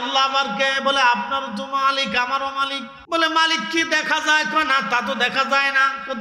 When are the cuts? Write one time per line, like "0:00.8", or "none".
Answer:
0:02.9